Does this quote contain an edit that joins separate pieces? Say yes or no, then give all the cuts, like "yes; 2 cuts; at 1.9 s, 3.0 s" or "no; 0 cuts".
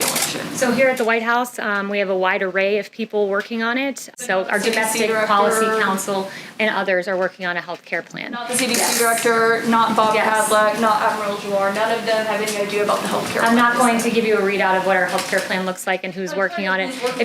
yes; 1 cut; at 4.1 s